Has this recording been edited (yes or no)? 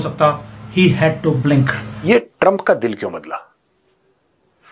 yes